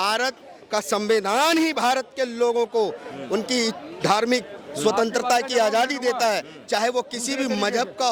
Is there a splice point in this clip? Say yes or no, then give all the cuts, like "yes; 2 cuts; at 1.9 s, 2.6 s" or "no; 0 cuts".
no; 0 cuts